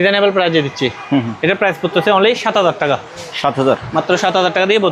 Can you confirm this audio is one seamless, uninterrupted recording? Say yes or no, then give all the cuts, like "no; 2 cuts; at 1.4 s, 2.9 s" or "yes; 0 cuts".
yes; 0 cuts